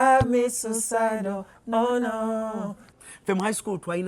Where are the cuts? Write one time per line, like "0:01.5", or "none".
0:02.8